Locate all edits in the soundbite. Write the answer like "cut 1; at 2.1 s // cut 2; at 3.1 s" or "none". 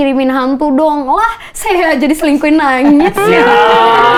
none